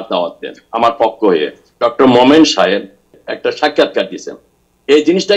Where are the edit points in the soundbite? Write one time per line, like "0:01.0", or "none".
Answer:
0:01.6
0:03.2